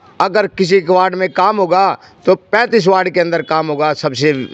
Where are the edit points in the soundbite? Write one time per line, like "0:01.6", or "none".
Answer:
none